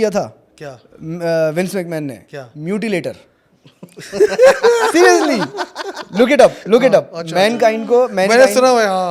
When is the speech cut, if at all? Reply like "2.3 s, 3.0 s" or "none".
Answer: none